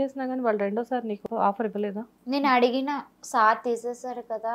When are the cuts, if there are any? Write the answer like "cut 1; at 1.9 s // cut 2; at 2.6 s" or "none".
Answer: cut 1; at 1.2 s